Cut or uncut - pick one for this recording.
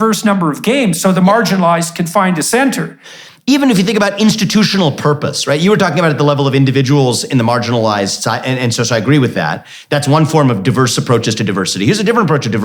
cut